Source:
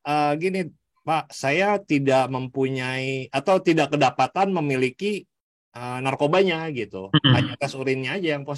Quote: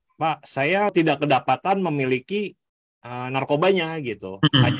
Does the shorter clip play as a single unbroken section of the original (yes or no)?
no